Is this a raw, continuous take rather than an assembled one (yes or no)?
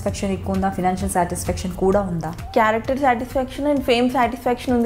no